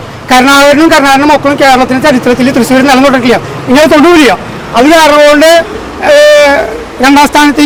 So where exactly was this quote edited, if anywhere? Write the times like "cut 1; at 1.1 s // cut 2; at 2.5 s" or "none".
none